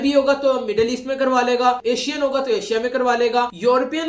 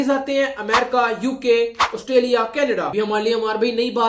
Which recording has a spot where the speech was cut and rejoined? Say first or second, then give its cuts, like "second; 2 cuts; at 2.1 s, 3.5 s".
second; 1 cut; at 2.9 s